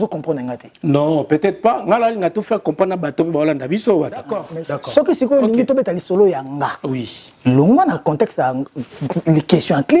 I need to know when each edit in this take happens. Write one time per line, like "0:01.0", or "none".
0:04.4